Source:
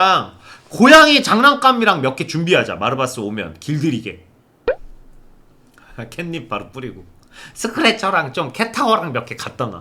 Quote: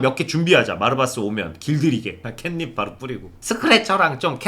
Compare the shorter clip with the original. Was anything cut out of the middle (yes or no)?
yes